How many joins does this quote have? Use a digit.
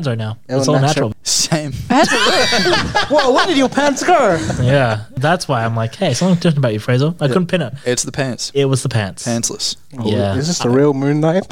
1